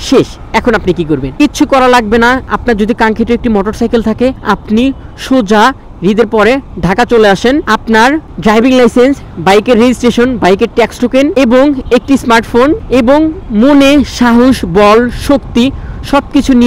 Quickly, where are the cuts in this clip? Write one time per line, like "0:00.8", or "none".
none